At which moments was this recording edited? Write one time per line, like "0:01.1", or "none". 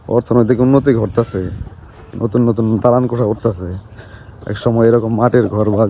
none